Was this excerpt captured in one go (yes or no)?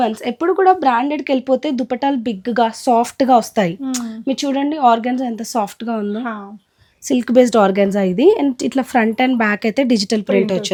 yes